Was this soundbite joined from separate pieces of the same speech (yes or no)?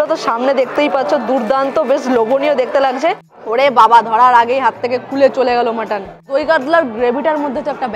yes